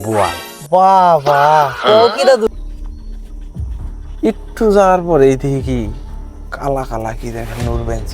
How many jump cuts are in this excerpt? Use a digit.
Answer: 1